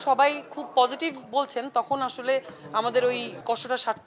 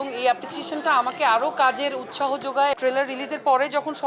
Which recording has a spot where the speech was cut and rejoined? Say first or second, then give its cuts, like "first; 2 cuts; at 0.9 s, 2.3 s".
second; 1 cut; at 2.8 s